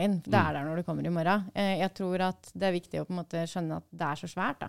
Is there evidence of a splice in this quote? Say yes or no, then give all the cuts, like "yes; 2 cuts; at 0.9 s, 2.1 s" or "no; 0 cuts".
no; 0 cuts